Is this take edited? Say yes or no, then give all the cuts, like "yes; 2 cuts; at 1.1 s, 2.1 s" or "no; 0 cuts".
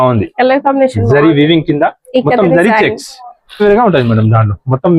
yes; 1 cut; at 3.6 s